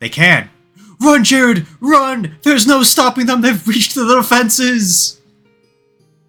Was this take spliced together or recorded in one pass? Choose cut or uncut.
uncut